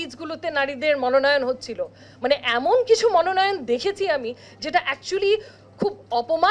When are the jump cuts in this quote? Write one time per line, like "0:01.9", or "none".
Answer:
none